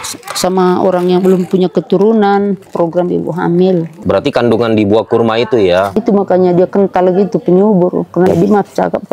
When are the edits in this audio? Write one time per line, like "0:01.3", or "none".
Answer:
0:02.6
0:03.9
0:06.0
0:08.3